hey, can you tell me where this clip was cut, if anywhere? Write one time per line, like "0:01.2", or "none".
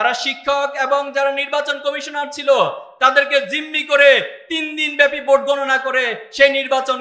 none